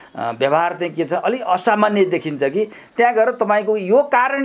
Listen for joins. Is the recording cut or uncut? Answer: uncut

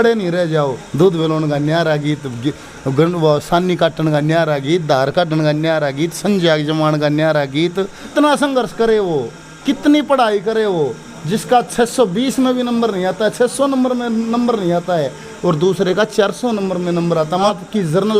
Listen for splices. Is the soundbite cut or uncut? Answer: cut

